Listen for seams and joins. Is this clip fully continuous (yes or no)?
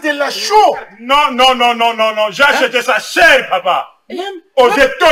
yes